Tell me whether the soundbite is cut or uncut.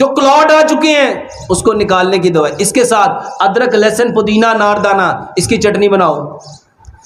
uncut